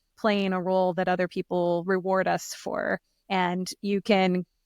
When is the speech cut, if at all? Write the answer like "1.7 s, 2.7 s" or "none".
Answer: none